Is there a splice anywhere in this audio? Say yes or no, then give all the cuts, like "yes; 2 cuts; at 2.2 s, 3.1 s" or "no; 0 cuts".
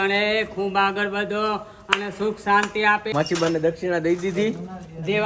yes; 1 cut; at 3.1 s